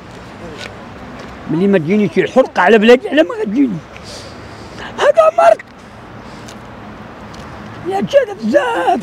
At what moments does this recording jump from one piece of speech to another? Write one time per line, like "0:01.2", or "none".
none